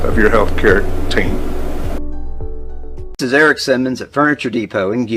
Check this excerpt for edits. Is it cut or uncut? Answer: cut